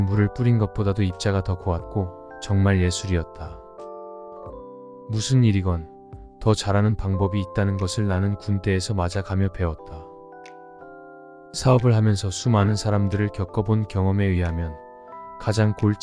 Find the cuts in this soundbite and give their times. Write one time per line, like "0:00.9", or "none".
0:03.3
0:05.1